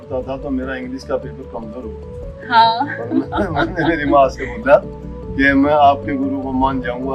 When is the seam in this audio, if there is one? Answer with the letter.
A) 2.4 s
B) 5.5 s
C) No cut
C